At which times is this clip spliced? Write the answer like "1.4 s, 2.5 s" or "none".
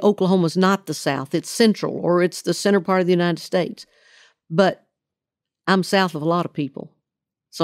none